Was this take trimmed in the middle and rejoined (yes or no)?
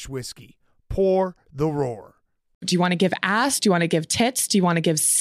yes